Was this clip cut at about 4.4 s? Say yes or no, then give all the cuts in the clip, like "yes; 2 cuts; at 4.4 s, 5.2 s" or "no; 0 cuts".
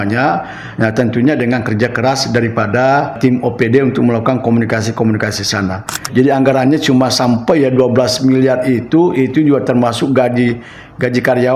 no; 2 cuts; at 3.2 s, 6.0 s